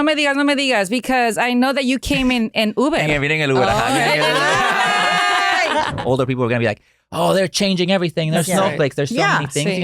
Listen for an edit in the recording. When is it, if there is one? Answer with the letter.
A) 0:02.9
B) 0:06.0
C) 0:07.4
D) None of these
B